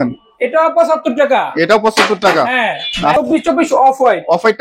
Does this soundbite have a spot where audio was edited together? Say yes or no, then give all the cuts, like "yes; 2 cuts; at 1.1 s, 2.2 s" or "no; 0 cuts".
yes; 1 cut; at 3.2 s